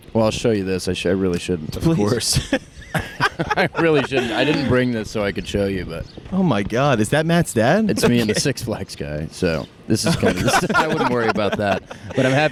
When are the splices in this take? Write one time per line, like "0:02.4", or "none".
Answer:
none